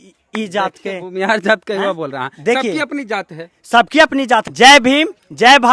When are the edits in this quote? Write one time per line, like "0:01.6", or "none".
0:04.5